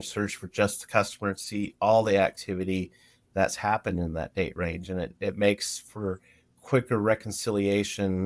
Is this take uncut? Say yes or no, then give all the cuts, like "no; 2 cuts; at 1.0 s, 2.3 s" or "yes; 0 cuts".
yes; 0 cuts